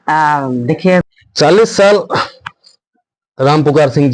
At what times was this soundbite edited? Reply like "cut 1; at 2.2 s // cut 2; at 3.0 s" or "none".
cut 1; at 1.0 s